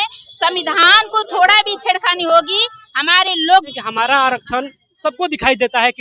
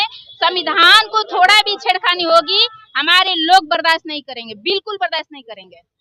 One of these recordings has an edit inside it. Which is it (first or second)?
first